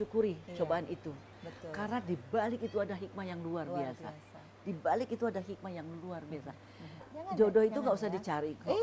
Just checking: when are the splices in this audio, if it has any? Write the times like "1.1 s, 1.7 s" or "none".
7.1 s